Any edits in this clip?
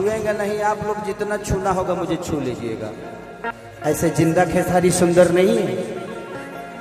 yes; 1 cut; at 3.5 s

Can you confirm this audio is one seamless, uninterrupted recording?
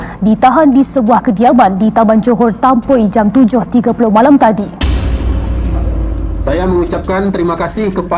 no; 1 cut; at 6.4 s

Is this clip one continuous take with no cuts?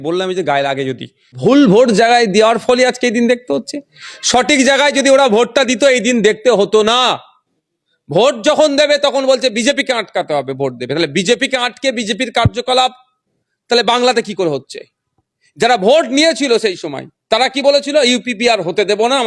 no; 1 cut; at 1.4 s

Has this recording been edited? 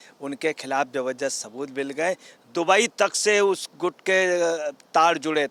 no; 0 cuts

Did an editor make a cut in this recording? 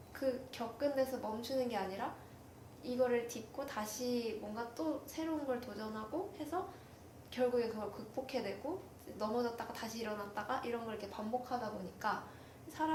no; 0 cuts

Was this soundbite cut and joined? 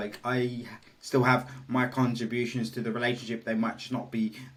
no; 0 cuts

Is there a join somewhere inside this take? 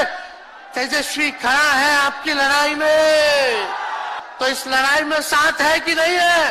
yes; 1 cut; at 4.2 s

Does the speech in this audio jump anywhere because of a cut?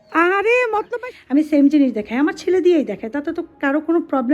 yes; 1 cut; at 0.9 s

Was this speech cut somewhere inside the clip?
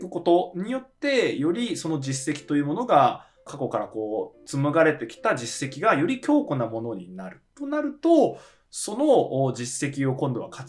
no; 0 cuts

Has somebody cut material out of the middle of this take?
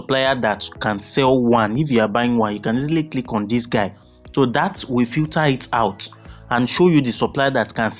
no; 0 cuts

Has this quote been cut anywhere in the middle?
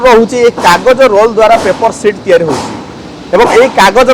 no; 0 cuts

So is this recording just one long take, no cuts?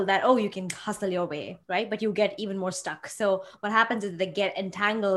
no; 1 cut; at 1.5 s

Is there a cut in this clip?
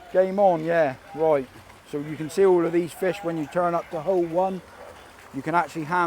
no; 0 cuts

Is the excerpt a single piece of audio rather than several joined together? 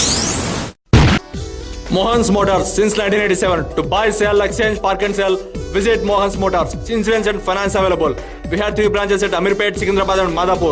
no; 1 cut; at 1.2 s

